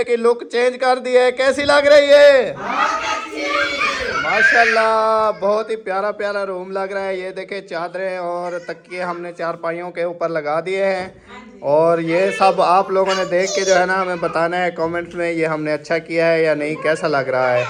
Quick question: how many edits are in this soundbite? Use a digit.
0